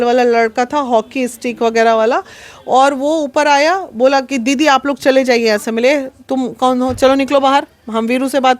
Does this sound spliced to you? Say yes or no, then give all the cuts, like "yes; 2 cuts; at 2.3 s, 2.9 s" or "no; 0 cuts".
no; 0 cuts